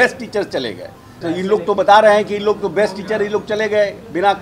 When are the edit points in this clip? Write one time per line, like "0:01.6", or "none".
0:01.1